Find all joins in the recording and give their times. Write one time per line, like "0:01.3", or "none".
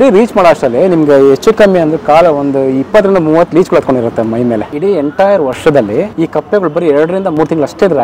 0:04.7
0:06.1